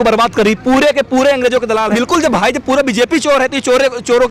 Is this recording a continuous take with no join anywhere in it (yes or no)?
no